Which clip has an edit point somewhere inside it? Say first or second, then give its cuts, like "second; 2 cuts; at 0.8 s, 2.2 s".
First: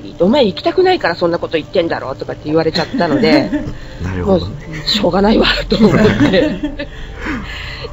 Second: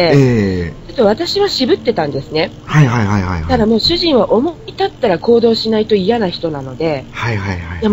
first; 1 cut; at 5.8 s